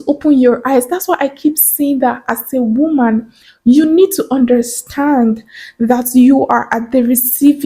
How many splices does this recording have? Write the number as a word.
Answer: zero